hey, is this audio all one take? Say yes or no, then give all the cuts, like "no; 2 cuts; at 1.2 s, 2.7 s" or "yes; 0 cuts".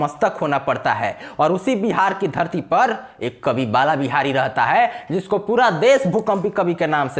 yes; 0 cuts